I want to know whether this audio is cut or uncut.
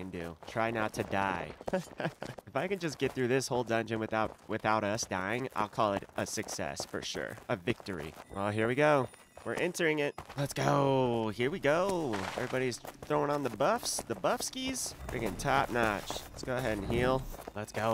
uncut